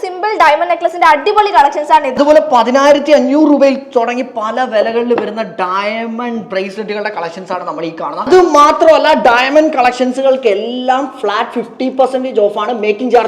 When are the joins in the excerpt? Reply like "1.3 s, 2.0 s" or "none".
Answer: 2.1 s, 8.3 s